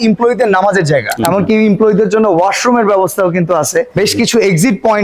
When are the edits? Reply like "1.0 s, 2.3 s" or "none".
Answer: 1.1 s